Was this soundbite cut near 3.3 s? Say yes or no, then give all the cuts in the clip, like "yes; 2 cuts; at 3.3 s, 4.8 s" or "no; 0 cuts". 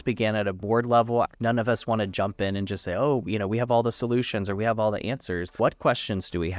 no; 2 cuts; at 1.3 s, 5.5 s